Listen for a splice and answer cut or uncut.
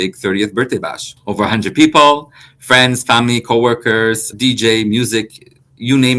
cut